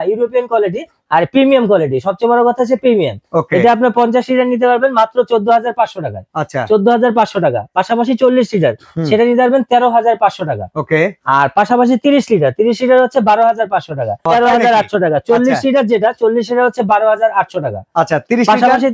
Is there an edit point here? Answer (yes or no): yes